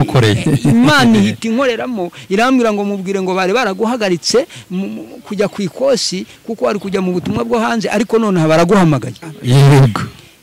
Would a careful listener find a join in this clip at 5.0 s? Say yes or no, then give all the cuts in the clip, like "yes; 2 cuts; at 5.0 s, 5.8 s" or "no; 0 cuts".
no; 1 cut; at 9.2 s